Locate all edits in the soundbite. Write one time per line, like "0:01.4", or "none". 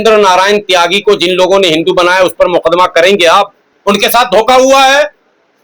0:03.7